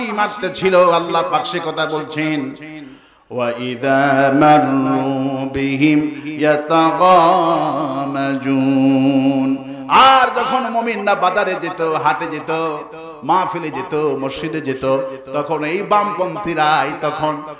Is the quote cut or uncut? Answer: uncut